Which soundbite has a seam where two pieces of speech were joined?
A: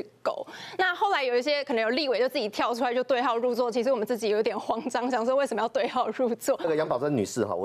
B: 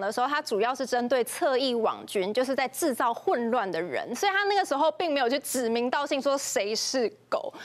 A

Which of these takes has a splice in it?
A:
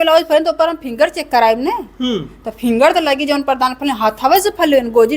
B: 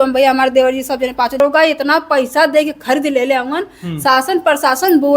B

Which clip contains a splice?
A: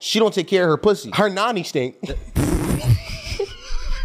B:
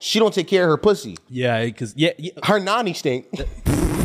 A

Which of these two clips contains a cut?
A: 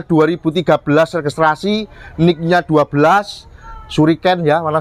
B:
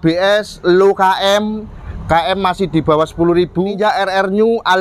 B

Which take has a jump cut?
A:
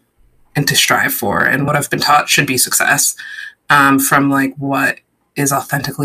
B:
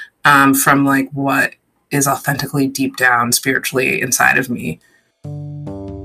B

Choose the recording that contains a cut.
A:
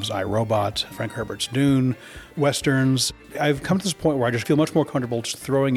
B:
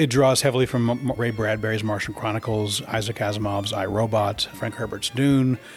A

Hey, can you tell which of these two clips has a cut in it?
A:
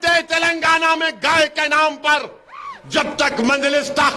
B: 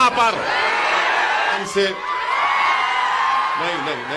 B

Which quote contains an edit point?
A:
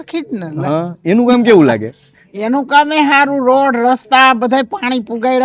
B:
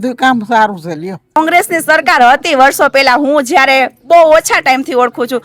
B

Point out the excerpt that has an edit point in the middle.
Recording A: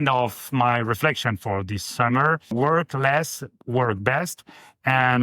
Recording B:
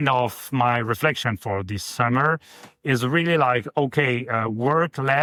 A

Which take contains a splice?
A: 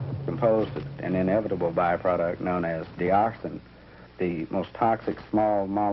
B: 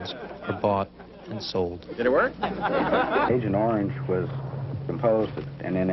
B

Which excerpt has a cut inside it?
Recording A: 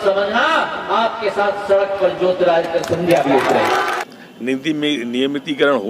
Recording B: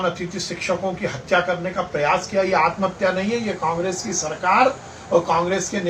A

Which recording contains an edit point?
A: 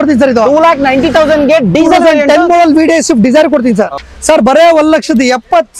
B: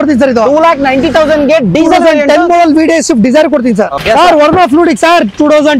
A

